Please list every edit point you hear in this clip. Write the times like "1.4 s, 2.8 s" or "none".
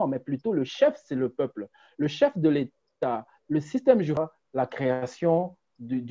4.1 s

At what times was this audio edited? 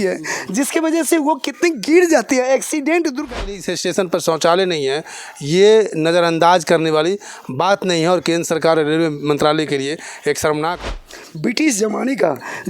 3.4 s, 10.8 s

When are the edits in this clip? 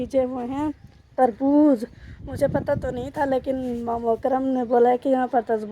none

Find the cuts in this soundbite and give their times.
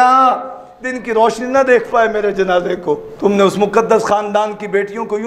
3.1 s

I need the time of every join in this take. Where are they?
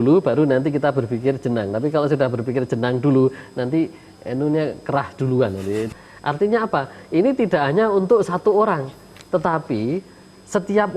5.9 s

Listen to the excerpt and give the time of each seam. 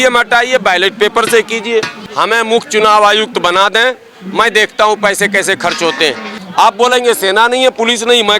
2.0 s, 6.4 s

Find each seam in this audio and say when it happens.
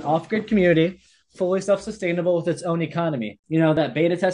3.4 s

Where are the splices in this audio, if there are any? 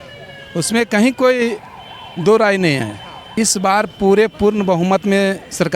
3.2 s

